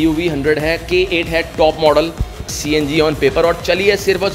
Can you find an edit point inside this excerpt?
yes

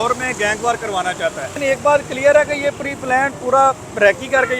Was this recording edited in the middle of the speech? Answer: yes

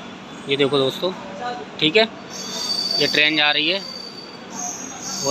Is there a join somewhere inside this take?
no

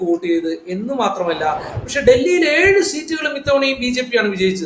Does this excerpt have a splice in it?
yes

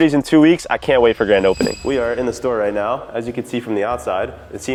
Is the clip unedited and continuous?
yes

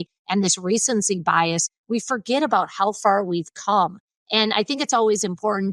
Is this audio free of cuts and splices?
yes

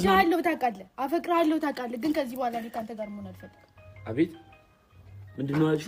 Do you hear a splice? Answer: no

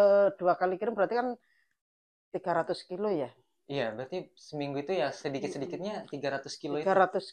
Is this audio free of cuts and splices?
yes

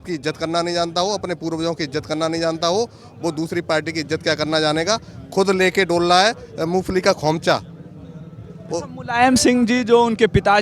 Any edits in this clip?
no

